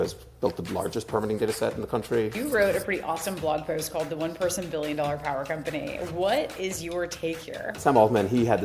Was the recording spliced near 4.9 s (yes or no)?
no